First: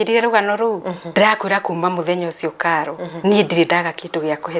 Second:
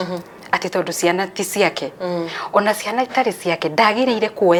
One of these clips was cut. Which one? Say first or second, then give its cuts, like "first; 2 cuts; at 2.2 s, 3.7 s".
first; 2 cuts; at 1.0 s, 3.1 s